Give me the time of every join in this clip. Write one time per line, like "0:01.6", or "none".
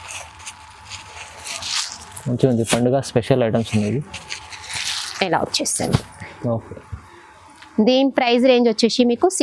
none